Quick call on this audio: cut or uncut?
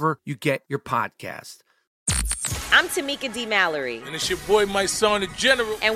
cut